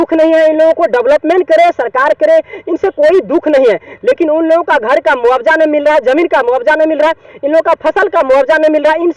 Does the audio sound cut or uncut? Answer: uncut